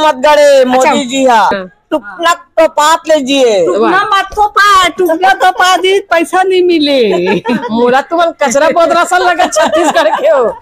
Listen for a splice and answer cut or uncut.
cut